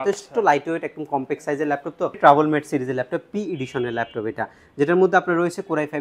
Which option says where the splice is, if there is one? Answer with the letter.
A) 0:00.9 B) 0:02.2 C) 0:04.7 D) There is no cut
B